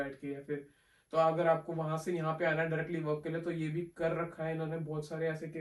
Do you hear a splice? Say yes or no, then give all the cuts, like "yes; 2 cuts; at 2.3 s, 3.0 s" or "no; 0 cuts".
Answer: no; 0 cuts